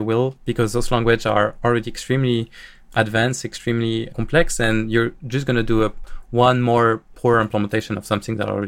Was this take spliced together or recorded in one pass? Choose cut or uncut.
cut